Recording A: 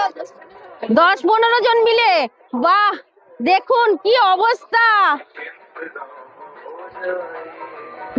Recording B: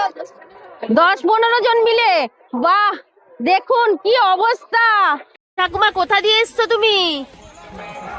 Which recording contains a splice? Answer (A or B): B